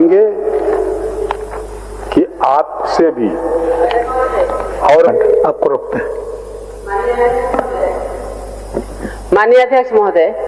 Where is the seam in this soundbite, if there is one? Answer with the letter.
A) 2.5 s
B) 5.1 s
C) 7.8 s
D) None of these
B